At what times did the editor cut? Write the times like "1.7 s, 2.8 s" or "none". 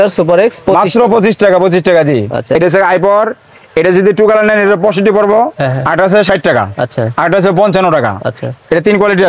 none